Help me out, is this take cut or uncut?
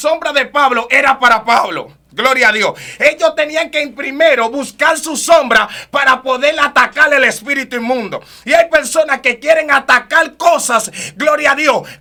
uncut